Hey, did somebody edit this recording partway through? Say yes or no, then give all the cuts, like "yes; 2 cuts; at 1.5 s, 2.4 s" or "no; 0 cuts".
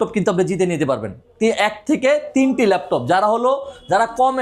no; 0 cuts